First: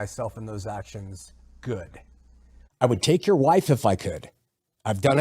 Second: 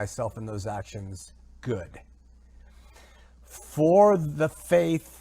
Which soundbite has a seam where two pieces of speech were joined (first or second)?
first